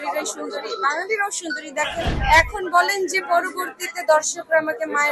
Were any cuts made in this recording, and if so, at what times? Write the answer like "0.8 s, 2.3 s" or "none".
2.1 s